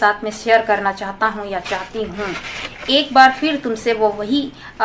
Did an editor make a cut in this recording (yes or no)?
no